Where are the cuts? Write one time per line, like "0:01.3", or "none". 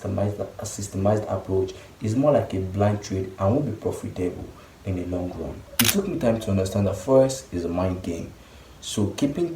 0:05.6